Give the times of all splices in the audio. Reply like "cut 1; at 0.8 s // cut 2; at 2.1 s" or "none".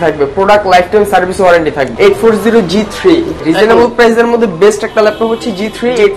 cut 1; at 1.9 s // cut 2; at 3.4 s